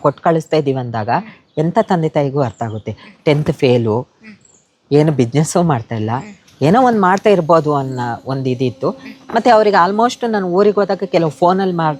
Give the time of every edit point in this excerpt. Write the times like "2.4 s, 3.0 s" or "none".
none